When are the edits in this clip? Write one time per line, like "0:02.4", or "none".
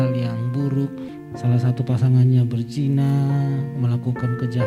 0:01.1